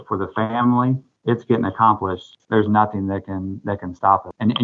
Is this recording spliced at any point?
yes; 1 cut; at 2.3 s

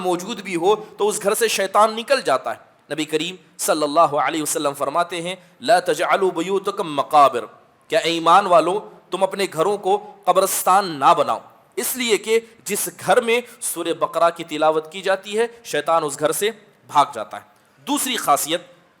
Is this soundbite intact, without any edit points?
yes; 0 cuts

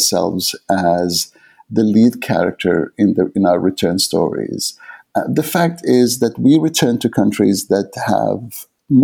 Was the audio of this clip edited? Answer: no; 0 cuts

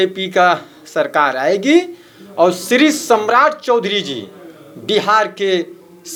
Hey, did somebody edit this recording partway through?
no; 0 cuts

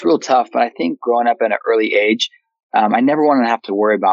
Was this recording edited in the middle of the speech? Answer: yes; 1 cut; at 1.0 s

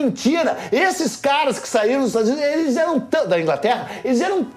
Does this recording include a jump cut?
yes; 1 cut; at 1.0 s

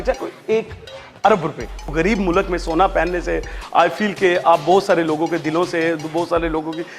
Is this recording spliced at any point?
yes; 1 cut; at 1.9 s

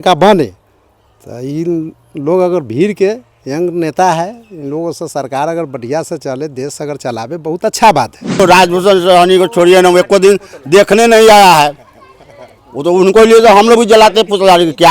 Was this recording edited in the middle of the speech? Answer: yes; 1 cut; at 8.4 s

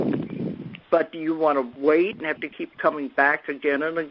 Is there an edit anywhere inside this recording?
no; 0 cuts

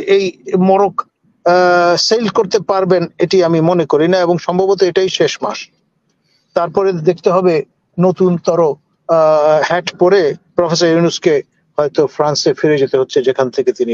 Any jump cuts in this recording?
no; 0 cuts

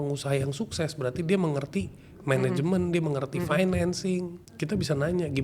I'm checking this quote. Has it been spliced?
yes; 1 cut; at 4.4 s

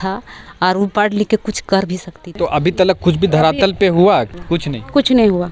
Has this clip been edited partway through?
yes; 2 cuts; at 2.3 s, 4.3 s

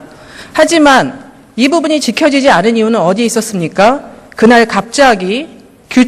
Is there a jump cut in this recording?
yes; 1 cut; at 3.6 s

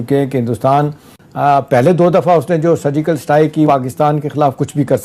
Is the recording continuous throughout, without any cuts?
no; 2 cuts; at 1.1 s, 3.7 s

